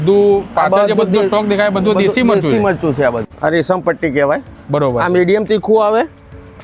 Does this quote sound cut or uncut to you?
cut